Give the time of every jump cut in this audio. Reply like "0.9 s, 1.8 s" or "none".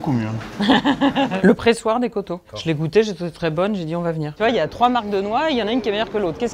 1.3 s, 4.3 s